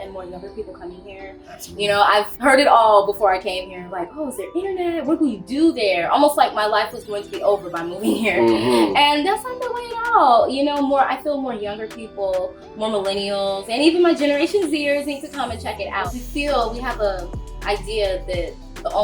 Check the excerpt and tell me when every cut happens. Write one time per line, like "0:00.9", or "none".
0:02.3
0:16.1